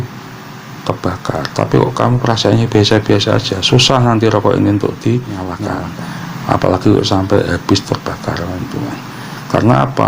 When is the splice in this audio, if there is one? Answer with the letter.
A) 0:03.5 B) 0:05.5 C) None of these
B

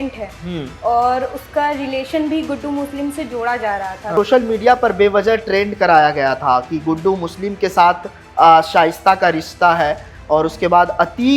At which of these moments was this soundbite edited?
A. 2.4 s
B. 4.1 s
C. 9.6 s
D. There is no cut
B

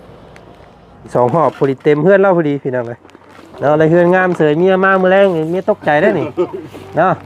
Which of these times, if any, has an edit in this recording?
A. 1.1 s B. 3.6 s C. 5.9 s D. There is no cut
A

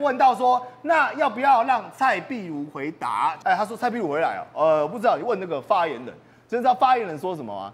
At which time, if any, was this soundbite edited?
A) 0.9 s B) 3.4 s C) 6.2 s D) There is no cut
B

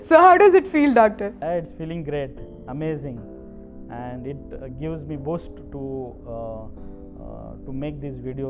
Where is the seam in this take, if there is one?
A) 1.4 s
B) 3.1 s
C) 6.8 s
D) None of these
A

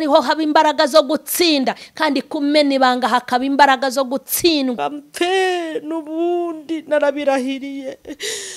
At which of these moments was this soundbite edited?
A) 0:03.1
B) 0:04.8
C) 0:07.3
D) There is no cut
B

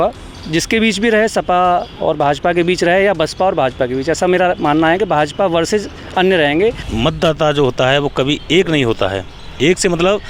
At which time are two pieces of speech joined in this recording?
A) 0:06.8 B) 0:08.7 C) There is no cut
A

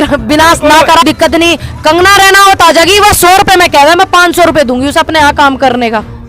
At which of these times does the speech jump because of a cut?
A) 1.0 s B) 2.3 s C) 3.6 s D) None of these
A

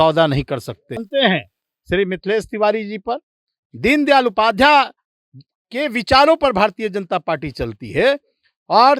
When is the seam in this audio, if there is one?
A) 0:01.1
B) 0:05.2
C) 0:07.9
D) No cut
A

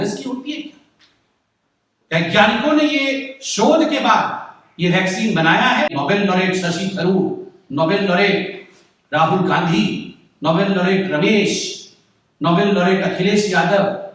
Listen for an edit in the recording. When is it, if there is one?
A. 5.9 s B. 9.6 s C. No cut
A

